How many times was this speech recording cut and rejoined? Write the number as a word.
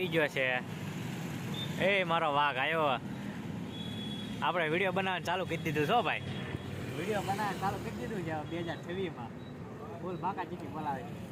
zero